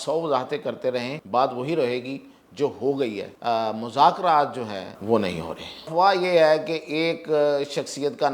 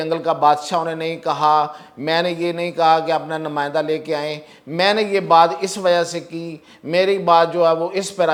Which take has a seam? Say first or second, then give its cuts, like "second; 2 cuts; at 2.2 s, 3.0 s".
first; 4 cuts; at 1.2 s, 3.3 s, 4.9 s, 5.9 s